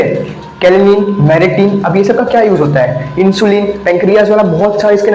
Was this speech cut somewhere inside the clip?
no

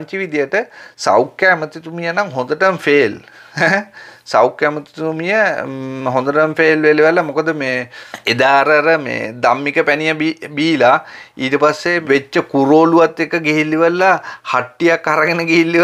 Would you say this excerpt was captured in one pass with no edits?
yes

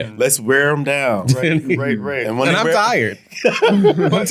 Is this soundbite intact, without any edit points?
yes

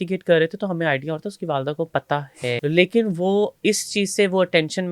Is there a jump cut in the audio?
yes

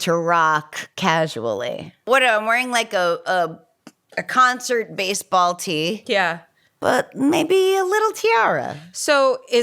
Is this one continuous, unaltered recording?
no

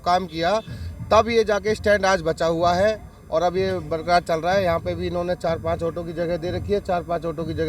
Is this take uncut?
yes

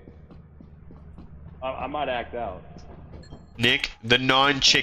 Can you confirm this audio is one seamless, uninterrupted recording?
no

